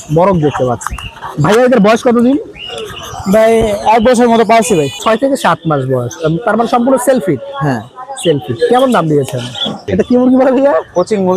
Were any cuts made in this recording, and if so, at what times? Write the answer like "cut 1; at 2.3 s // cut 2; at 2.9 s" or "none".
cut 1; at 4.9 s // cut 2; at 9.8 s